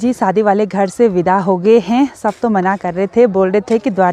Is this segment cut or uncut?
uncut